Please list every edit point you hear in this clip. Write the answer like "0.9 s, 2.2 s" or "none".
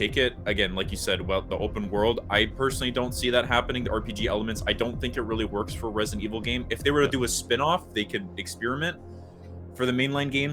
none

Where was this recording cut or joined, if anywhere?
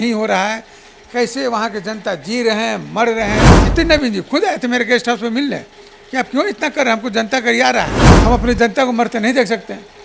3.6 s, 8.0 s

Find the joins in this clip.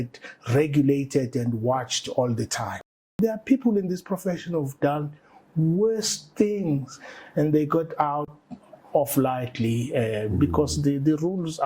3.0 s

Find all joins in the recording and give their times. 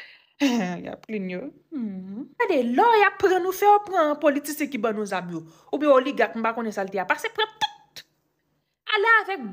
2.4 s

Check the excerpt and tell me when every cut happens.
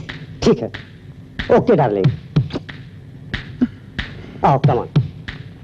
none

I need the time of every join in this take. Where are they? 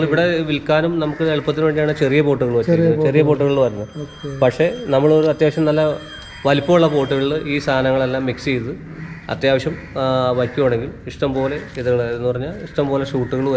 none

